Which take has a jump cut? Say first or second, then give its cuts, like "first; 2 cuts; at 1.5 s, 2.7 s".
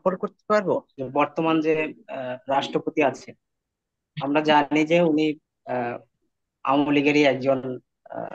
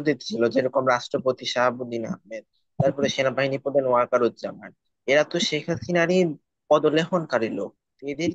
first; 1 cut; at 0.9 s